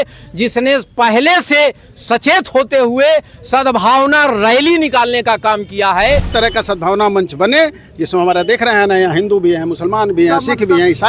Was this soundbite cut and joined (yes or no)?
yes